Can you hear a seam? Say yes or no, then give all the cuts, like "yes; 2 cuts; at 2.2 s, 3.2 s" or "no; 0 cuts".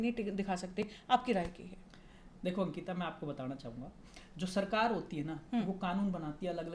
no; 0 cuts